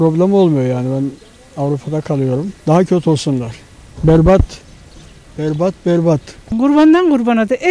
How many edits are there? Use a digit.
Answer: 2